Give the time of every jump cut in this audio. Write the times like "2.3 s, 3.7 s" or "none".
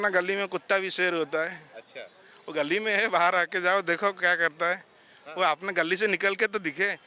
none